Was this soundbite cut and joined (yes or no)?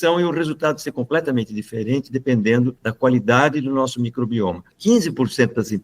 yes